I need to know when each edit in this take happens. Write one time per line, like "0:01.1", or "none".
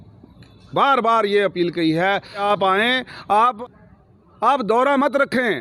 0:02.4
0:03.6